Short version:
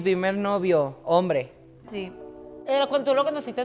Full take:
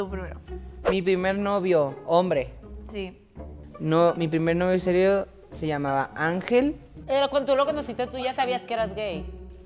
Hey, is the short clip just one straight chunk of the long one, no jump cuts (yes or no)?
no